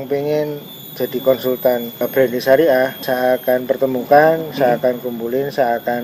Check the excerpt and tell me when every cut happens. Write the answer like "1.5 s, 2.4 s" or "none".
2.0 s, 3.0 s